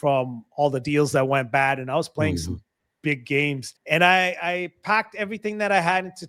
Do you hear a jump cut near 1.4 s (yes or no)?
no